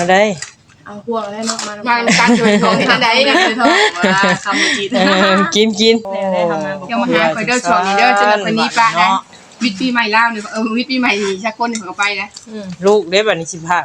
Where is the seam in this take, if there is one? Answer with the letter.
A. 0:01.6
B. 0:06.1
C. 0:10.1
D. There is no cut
B